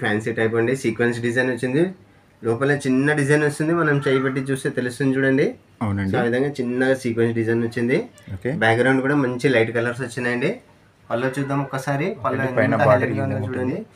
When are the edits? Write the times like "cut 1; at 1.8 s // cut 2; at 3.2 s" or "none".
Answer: none